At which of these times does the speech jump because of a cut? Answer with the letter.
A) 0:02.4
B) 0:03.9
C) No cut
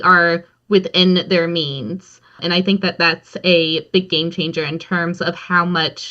A